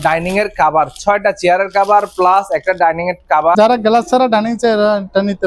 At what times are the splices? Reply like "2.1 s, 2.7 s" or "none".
3.6 s